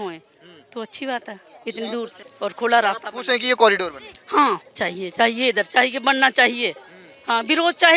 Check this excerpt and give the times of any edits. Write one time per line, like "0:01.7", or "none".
0:02.2